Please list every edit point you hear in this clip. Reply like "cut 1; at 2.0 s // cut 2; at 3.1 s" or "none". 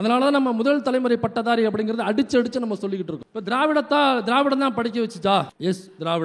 none